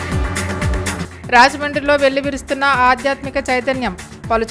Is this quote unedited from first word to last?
no; 1 cut; at 1.0 s

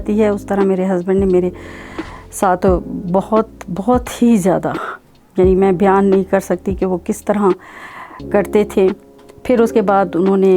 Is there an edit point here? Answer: no; 0 cuts

